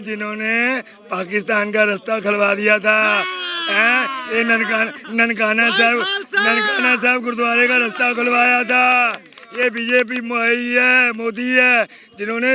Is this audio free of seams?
yes; 0 cuts

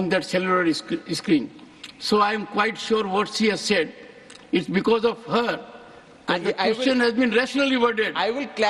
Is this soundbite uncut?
yes; 0 cuts

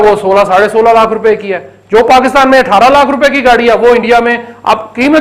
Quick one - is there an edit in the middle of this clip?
no; 0 cuts

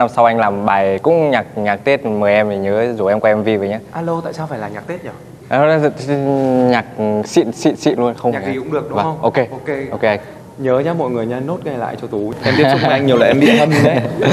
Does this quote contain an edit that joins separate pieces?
yes; 1 cut; at 12.3 s

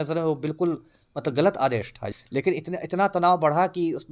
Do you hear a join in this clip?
yes; 1 cut; at 2.0 s

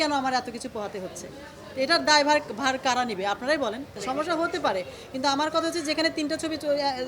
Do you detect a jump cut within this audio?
yes; 1 cut; at 4.0 s

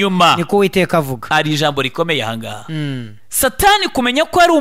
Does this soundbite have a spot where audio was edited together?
yes; 1 cut; at 3.2 s

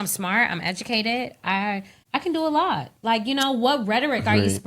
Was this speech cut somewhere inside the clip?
yes; 1 cut; at 1.9 s

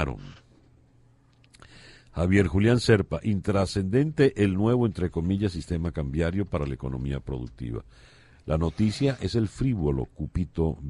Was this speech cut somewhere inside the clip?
yes; 1 cut; at 9.8 s

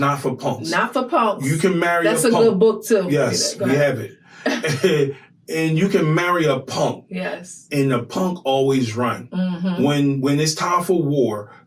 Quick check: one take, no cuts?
yes; 0 cuts

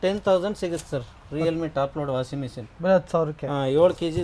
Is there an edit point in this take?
no; 0 cuts

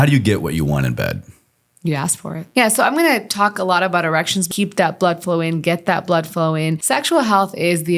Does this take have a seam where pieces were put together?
yes; 3 cuts; at 2.4 s, 4.5 s, 6.8 s

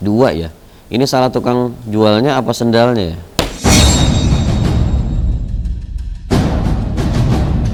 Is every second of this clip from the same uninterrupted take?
yes; 0 cuts

